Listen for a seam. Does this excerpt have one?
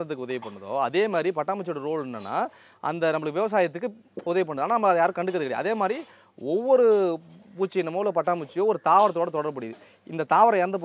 no; 0 cuts

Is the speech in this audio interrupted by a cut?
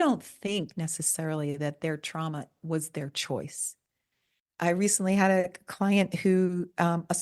no; 0 cuts

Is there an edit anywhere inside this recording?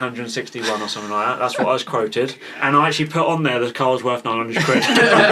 no; 0 cuts

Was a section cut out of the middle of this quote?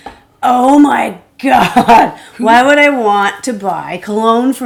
no; 0 cuts

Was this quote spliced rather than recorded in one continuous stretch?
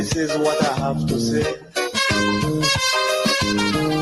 no; 0 cuts

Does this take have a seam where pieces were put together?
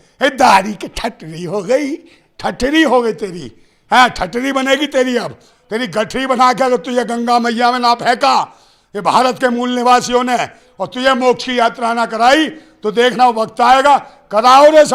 no; 0 cuts

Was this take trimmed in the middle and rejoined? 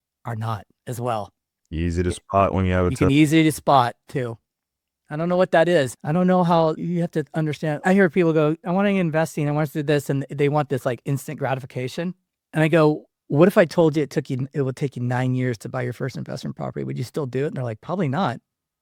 no; 0 cuts

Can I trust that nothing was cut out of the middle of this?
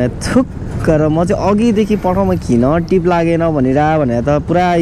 yes; 0 cuts

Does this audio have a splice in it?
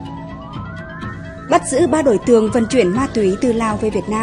yes; 1 cut; at 1.5 s

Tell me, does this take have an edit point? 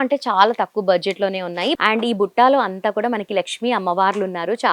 yes; 1 cut; at 1.8 s

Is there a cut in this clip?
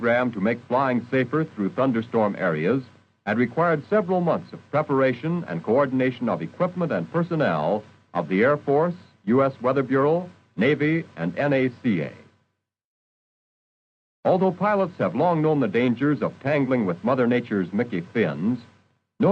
yes; 1 cut; at 4.0 s

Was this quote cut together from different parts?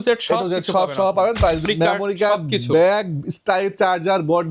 yes; 1 cut; at 1.6 s

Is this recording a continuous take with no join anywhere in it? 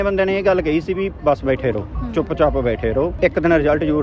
no; 1 cut; at 3.1 s

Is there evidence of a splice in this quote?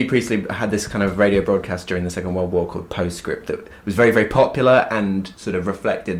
no; 0 cuts

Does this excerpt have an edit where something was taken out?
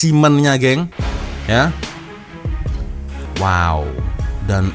yes; 1 cut; at 3.3 s

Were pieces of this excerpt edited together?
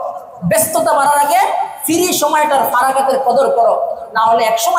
no; 0 cuts

